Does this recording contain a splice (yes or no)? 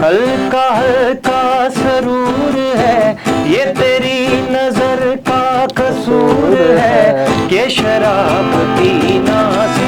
no